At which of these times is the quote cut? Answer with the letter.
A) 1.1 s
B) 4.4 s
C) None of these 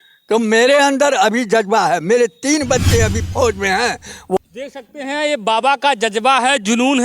B